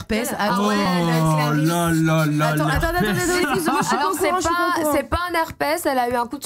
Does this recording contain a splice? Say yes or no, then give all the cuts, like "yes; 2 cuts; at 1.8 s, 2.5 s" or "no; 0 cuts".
no; 0 cuts